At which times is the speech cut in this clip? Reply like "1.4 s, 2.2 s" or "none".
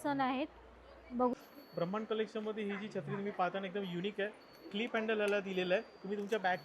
1.3 s